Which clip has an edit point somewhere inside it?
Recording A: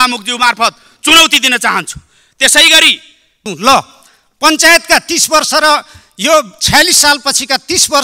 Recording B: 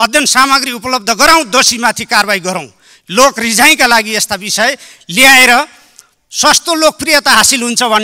A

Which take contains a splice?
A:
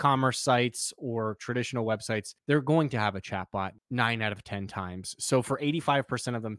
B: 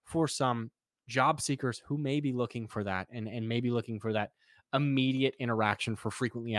A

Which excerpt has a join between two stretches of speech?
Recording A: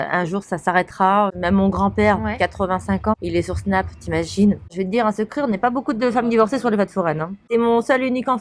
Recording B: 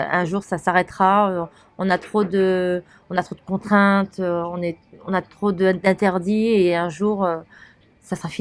A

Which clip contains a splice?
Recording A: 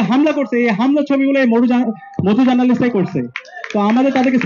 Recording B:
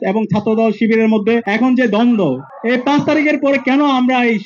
B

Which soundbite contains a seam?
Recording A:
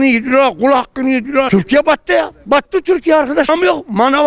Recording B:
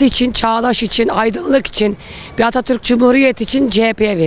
A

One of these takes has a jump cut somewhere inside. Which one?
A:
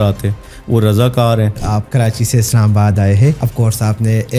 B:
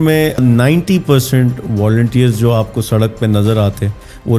A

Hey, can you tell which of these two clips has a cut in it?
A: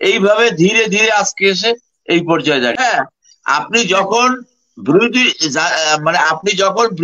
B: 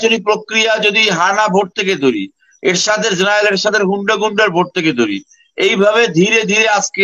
A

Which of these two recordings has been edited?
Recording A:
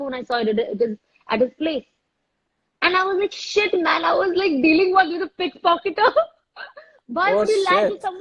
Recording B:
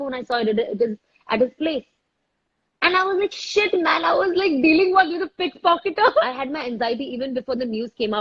B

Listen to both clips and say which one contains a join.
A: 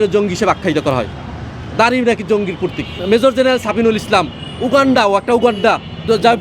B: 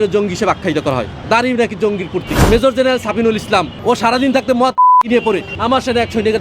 B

